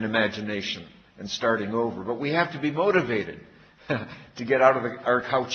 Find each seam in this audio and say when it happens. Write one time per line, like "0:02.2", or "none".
0:02.4